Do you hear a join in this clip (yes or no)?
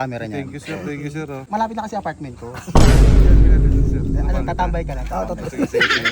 yes